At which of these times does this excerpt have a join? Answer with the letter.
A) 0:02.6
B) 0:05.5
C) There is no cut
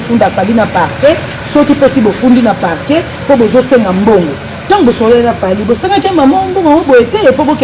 C